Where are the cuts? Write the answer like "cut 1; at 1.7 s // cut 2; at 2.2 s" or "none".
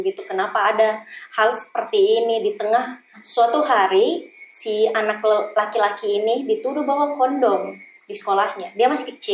cut 1; at 3.2 s